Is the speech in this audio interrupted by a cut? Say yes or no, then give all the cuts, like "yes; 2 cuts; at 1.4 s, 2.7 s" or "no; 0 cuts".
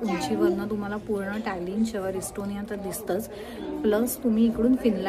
no; 0 cuts